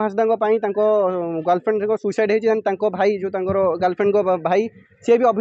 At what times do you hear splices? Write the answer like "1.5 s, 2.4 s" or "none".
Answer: none